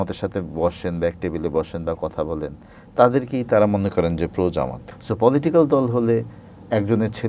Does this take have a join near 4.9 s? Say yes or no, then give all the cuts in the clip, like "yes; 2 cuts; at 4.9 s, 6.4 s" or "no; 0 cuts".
yes; 1 cut; at 4.9 s